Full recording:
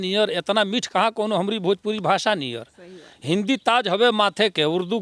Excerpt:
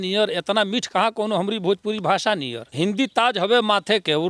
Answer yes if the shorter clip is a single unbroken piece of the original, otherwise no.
no